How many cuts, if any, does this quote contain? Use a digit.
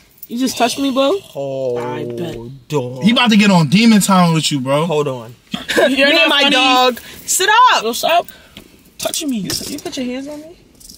1